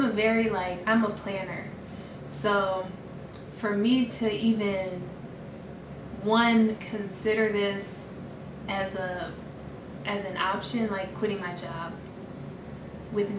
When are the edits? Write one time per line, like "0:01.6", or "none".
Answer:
none